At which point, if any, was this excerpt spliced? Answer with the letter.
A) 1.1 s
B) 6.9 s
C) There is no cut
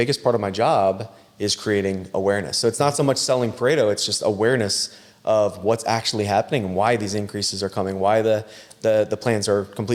C